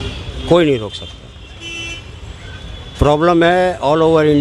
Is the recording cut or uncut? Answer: uncut